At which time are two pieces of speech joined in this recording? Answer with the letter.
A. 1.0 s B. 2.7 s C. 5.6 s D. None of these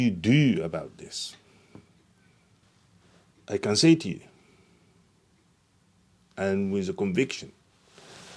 B